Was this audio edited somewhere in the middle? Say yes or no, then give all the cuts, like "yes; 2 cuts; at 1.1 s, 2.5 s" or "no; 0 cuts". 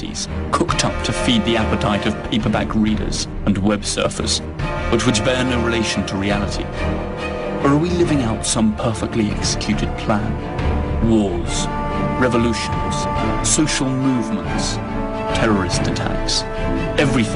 no; 0 cuts